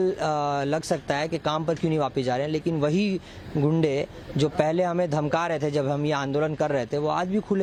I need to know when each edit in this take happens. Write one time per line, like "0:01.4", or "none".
none